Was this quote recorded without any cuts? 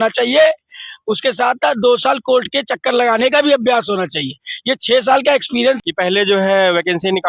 no; 1 cut; at 5.8 s

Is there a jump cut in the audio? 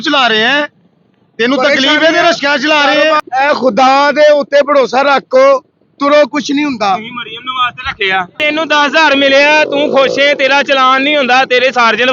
yes; 2 cuts; at 3.2 s, 8.4 s

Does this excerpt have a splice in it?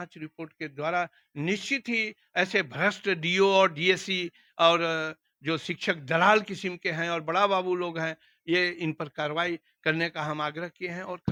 no; 0 cuts

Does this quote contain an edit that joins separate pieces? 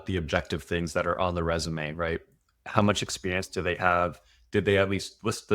no; 0 cuts

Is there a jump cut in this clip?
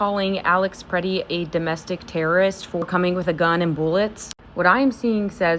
no; 0 cuts

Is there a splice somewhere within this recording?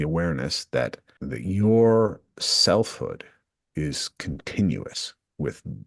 yes; 1 cut; at 1.1 s

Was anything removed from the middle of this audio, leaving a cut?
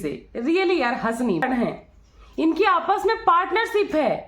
yes; 1 cut; at 1.4 s

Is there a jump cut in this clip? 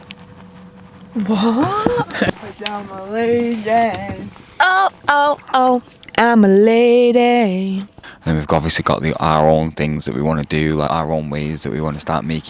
yes; 2 cuts; at 2.4 s, 8.1 s

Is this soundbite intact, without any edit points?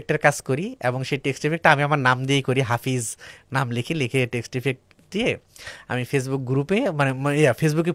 yes; 0 cuts

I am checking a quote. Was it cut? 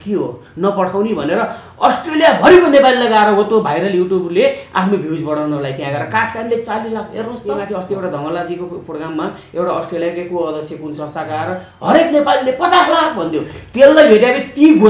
yes; 1 cut; at 7.5 s

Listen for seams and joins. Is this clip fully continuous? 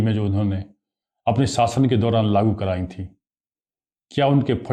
yes; 0 cuts

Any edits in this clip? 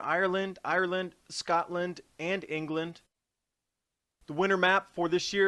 yes; 1 cut; at 3.1 s

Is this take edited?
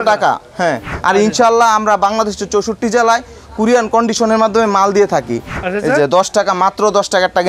yes; 2 cuts; at 0.9 s, 5.5 s

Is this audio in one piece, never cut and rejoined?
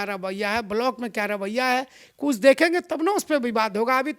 yes; 0 cuts

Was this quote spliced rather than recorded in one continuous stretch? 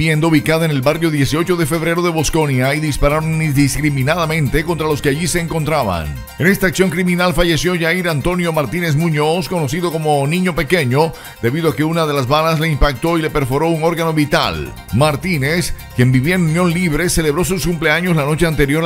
no; 0 cuts

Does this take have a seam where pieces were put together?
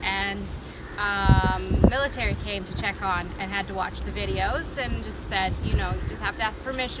no; 0 cuts

